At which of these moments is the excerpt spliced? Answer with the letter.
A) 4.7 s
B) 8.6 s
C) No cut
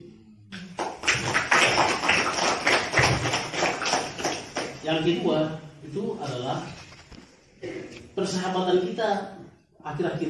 A